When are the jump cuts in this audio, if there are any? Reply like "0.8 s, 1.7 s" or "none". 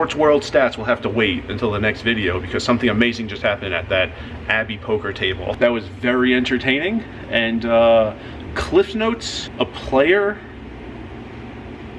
5.6 s, 9.4 s